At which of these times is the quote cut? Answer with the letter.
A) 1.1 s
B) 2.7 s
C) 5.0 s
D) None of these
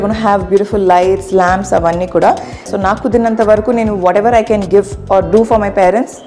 B